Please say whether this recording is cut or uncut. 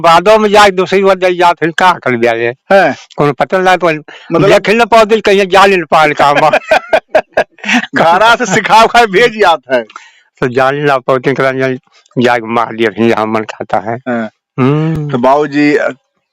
uncut